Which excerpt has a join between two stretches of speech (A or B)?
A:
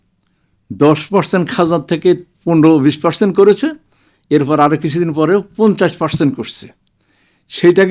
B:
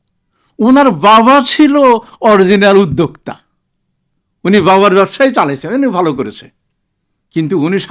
A